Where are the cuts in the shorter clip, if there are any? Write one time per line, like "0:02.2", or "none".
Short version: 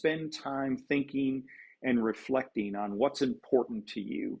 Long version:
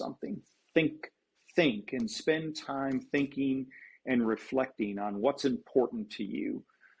none